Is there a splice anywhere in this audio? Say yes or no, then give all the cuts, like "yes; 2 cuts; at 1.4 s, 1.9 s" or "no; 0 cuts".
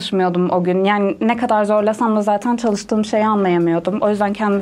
no; 0 cuts